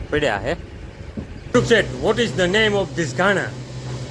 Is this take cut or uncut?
cut